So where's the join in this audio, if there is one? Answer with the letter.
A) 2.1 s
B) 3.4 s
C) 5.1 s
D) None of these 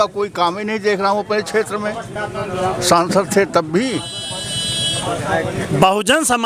D